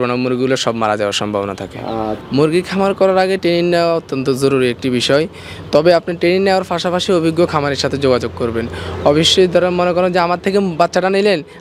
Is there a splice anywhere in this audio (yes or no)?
yes